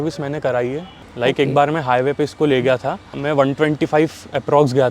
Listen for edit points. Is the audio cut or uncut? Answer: cut